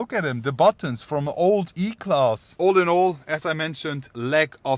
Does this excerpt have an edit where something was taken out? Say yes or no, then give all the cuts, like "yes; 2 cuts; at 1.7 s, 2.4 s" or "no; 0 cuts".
no; 0 cuts